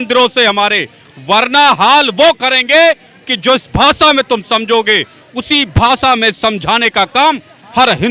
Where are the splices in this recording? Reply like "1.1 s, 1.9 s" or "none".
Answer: none